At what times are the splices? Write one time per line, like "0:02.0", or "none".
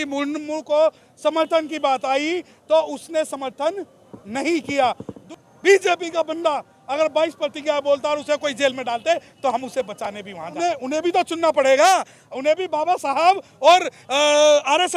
0:05.1
0:10.6